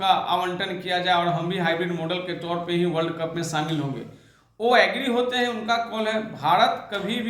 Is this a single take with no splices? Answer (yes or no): yes